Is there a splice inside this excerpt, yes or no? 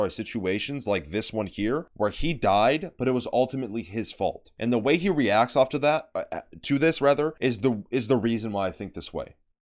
yes